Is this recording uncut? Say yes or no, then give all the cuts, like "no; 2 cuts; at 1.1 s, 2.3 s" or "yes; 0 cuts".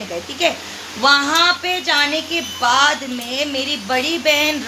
yes; 0 cuts